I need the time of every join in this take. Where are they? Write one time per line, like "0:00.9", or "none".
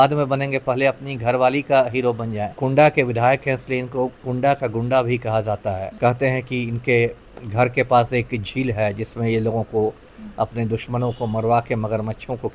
0:02.6
0:05.9